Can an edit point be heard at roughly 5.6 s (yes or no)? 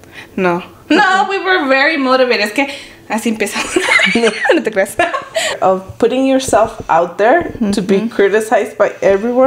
yes